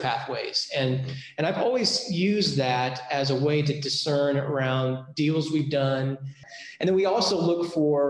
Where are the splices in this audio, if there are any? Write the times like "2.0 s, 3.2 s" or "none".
6.4 s

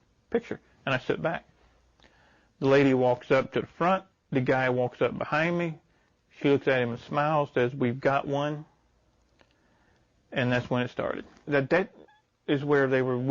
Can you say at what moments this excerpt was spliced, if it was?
11.5 s

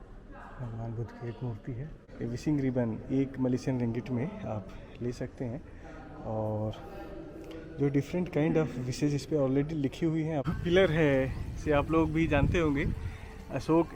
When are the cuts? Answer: 2.1 s, 10.5 s

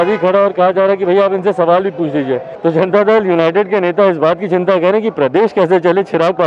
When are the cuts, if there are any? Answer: 2.5 s

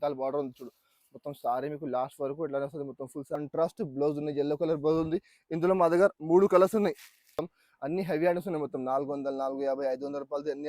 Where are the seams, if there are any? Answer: 3.4 s, 7.4 s

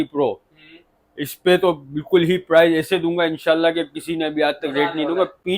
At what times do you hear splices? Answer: none

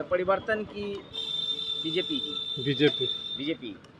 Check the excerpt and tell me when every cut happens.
none

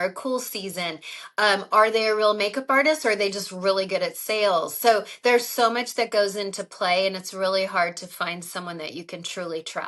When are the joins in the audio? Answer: none

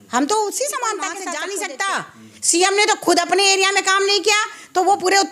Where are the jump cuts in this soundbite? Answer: 1.2 s

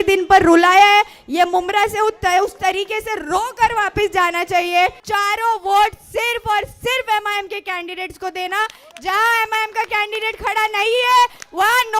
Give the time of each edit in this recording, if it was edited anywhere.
5.0 s

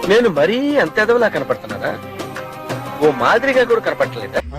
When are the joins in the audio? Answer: none

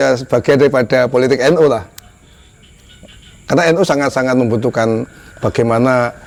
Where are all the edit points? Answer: none

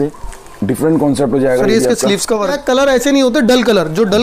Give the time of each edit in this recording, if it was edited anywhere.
2.6 s

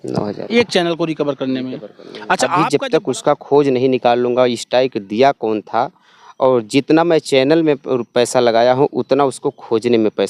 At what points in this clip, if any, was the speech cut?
2.5 s

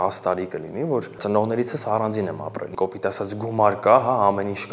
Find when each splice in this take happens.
1.2 s, 2.7 s

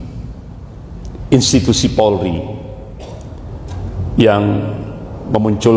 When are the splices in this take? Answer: none

